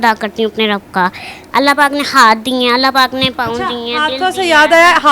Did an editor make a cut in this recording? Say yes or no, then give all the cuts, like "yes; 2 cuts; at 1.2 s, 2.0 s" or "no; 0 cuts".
no; 0 cuts